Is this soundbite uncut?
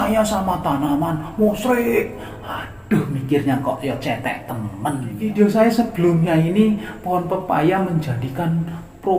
no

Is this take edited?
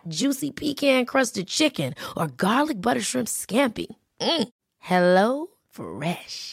no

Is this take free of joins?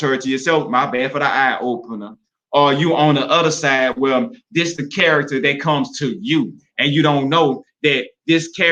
yes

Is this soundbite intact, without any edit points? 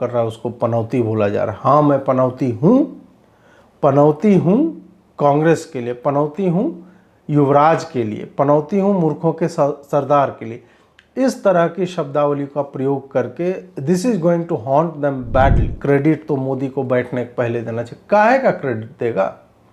no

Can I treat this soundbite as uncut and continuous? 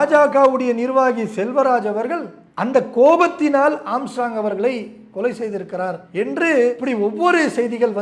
yes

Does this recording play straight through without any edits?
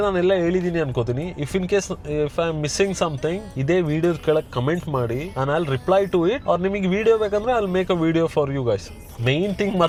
yes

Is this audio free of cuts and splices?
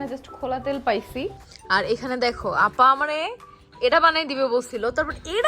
no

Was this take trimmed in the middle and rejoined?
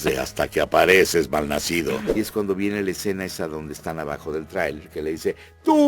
yes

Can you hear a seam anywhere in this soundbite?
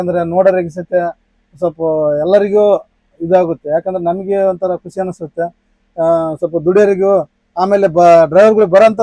no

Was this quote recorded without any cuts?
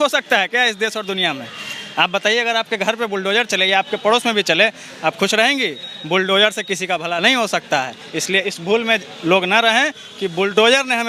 yes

